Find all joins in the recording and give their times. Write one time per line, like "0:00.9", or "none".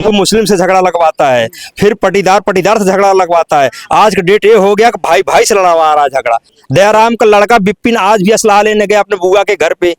0:06.5

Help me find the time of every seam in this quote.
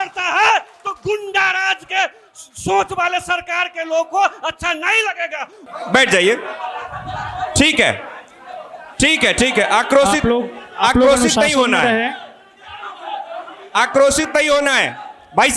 0:05.5

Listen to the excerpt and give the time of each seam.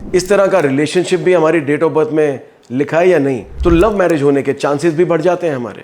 0:03.5

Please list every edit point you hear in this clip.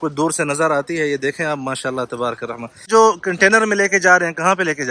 0:02.9

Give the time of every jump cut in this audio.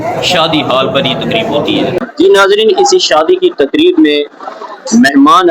0:02.1

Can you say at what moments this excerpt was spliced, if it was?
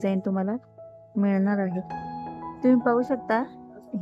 0:02.5

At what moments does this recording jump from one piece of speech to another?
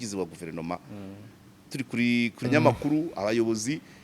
0:02.4

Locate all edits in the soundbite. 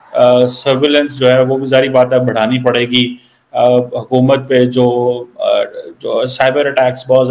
none

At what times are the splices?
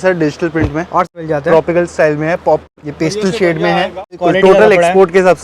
0:01.1
0:02.8
0:04.2

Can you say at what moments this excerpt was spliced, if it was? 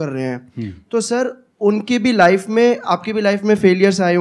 none

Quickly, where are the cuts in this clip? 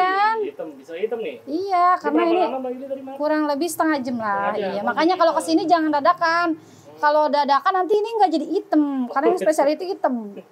none

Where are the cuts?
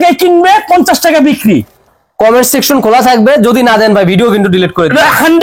0:01.8

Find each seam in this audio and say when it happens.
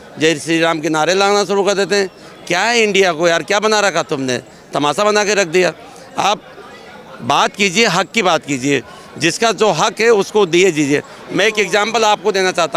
none

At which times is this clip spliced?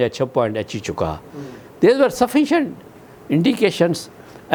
none

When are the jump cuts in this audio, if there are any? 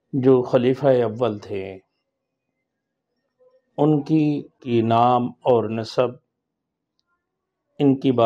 0:04.6

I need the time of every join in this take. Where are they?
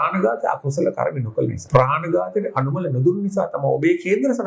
0:01.6

